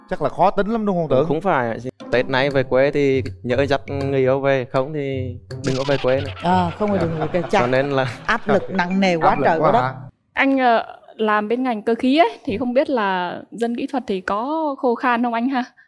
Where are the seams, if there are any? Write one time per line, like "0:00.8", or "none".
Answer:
0:01.9
0:10.0